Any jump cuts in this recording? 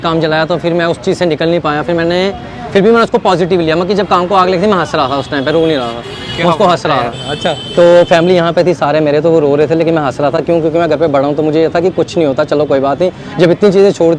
no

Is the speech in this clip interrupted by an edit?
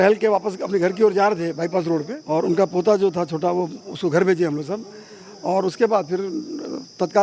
yes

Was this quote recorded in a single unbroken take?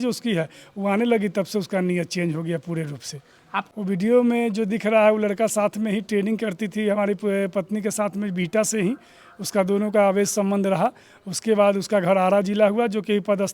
no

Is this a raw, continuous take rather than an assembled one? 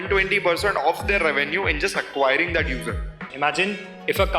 no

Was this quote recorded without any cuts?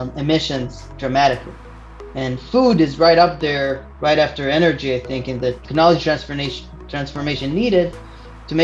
no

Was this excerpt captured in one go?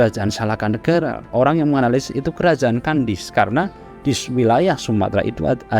no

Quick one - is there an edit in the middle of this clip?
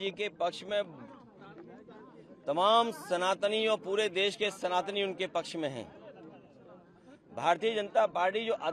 no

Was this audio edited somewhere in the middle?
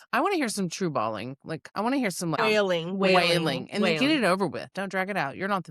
yes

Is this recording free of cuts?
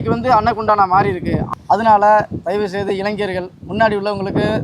no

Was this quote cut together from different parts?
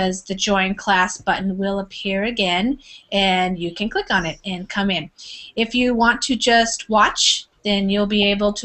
yes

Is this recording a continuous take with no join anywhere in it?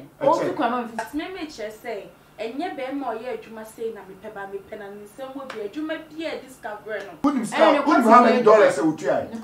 no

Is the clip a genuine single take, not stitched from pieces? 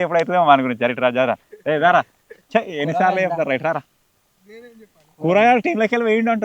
yes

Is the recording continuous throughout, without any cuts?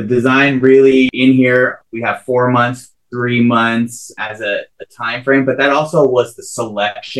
no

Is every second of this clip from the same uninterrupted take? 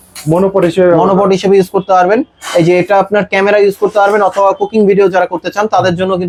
yes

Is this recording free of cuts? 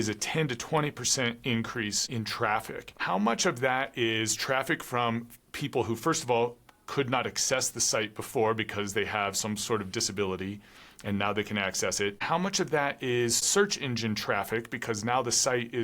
no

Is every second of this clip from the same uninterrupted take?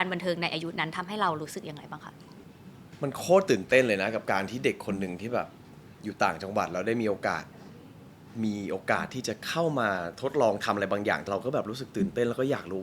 no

